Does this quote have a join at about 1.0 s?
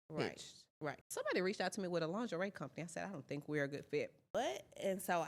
yes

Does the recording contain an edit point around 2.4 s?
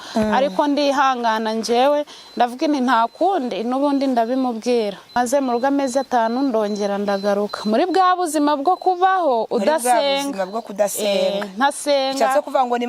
no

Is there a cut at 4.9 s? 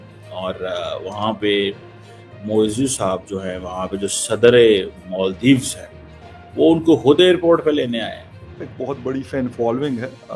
no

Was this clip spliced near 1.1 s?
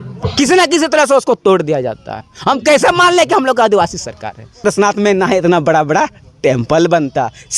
no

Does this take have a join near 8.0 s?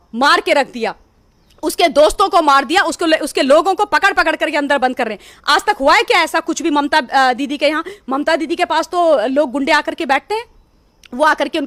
no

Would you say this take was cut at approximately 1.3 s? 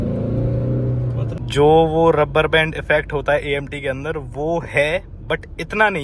yes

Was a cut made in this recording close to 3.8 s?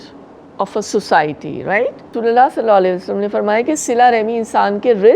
no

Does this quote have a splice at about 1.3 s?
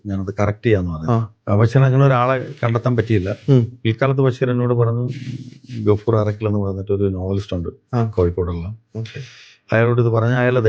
yes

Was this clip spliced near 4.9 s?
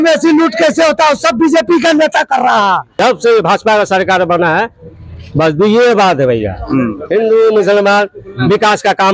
no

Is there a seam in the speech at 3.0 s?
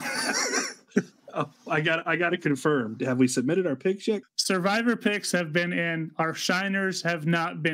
yes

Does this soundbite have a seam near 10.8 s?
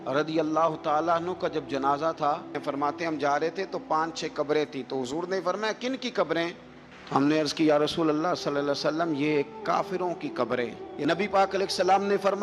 yes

